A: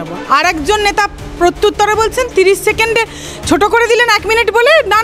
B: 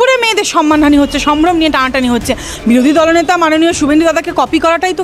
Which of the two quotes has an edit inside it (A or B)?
B